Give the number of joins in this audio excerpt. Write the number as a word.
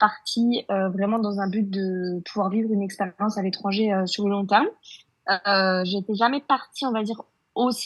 zero